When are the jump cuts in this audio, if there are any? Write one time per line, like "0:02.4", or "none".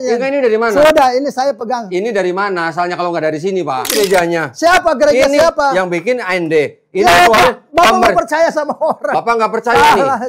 0:04.0
0:09.1